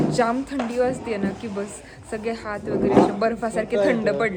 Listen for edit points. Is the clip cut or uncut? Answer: uncut